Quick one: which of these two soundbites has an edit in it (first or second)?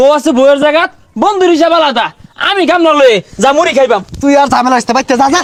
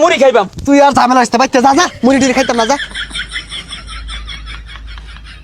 second